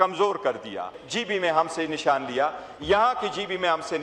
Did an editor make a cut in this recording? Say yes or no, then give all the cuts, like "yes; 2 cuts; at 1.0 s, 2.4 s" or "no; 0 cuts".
yes; 1 cut; at 1.0 s